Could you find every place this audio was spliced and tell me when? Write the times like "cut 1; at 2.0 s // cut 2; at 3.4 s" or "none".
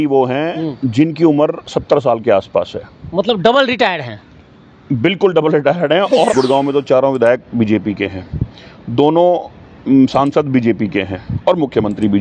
cut 1; at 6.3 s